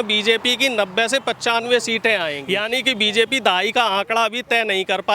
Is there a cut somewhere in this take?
yes; 1 cut; at 2.4 s

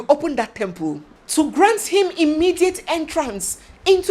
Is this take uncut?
no; 1 cut; at 1.1 s

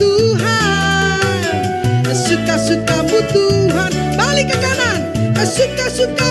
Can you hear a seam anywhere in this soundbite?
no; 0 cuts

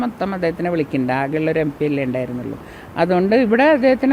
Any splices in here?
no; 0 cuts

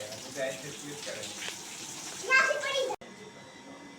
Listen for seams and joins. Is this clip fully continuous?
no; 1 cut; at 3.0 s

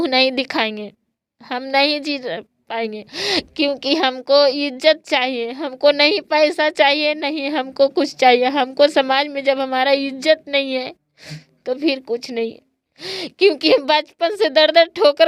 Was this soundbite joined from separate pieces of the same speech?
no; 0 cuts

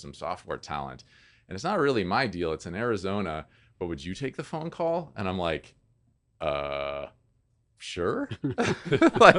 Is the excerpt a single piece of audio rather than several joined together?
yes; 0 cuts

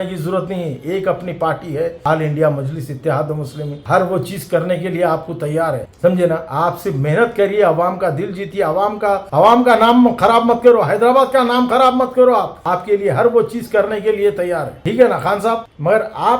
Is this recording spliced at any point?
no; 0 cuts

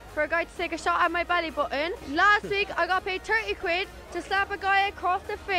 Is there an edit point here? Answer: no; 0 cuts

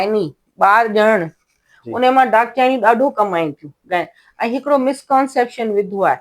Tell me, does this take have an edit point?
no; 0 cuts

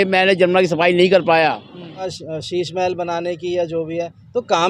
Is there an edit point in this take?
yes; 1 cut; at 2.1 s

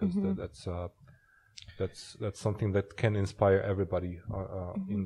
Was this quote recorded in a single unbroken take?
yes; 0 cuts

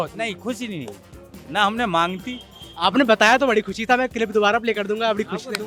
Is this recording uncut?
yes; 0 cuts

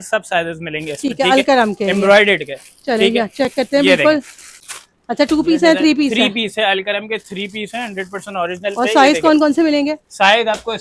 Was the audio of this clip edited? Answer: no; 0 cuts

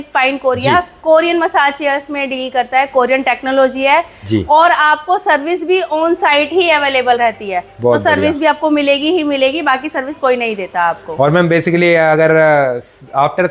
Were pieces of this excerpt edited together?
no; 0 cuts

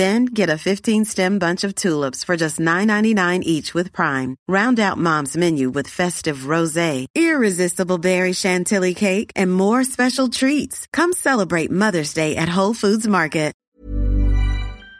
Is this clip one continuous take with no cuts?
no; 1 cut; at 13.6 s

